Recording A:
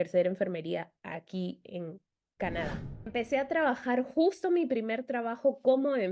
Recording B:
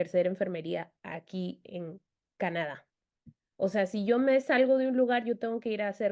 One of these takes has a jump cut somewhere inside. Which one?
A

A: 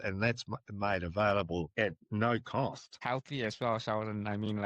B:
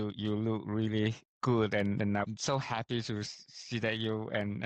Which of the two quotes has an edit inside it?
A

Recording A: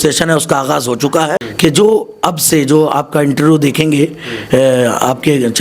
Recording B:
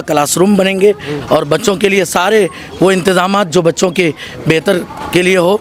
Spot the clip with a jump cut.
A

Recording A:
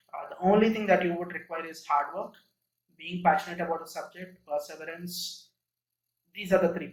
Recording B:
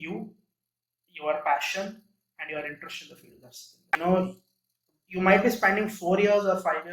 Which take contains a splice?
B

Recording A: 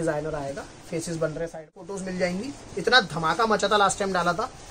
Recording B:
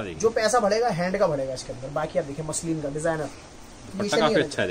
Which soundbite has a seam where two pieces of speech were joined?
A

